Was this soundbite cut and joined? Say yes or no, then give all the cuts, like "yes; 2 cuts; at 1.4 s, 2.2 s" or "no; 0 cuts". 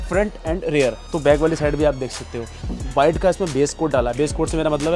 yes; 2 cuts; at 1.0 s, 2.7 s